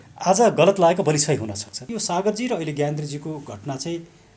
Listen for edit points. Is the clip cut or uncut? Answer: cut